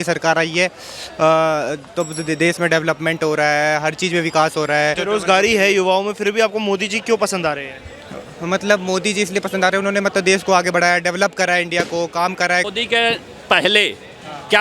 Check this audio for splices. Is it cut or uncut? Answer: cut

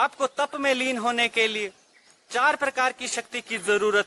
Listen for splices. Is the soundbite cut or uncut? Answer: uncut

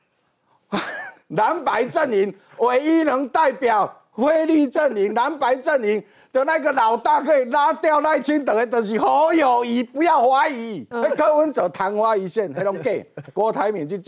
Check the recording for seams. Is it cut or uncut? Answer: cut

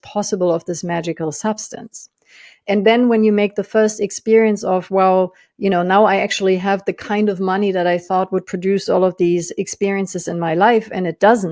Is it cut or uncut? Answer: uncut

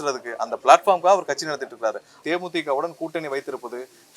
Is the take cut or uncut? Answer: cut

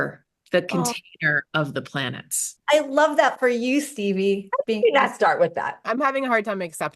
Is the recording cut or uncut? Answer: cut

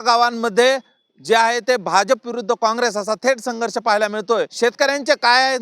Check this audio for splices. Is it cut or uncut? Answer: cut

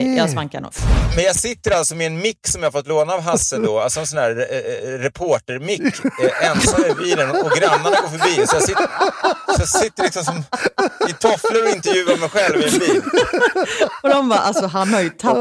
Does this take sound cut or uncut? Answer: cut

